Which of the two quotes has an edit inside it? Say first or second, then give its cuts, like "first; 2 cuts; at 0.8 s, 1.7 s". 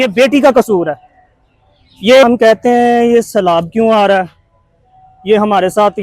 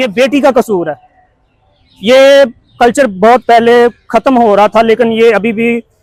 first; 1 cut; at 2.2 s